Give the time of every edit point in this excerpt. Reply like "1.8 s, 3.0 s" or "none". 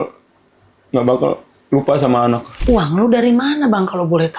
2.5 s